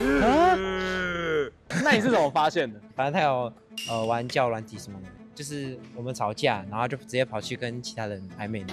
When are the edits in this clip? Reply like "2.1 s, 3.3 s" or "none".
1.6 s, 5.2 s